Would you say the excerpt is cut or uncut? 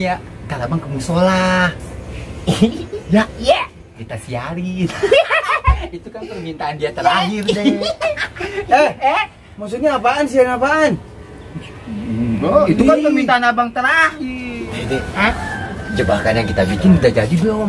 cut